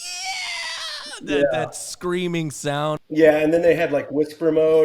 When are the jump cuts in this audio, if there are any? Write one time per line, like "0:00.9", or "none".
0:03.0